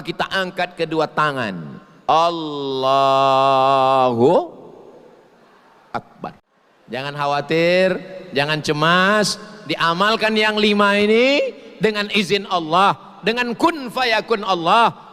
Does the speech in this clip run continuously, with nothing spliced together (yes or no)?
no